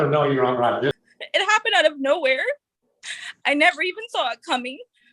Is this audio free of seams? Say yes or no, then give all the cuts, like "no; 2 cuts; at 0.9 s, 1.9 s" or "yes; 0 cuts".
no; 1 cut; at 0.9 s